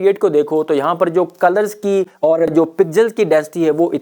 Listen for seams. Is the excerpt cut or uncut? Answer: cut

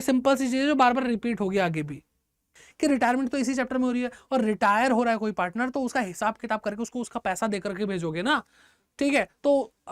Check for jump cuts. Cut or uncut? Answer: cut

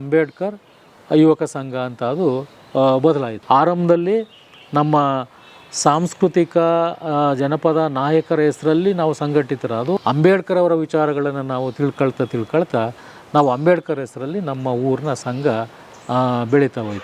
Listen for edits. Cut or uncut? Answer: cut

